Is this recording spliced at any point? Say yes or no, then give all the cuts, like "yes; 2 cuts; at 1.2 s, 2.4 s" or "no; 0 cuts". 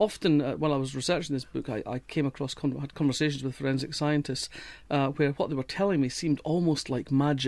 yes; 1 cut; at 1.9 s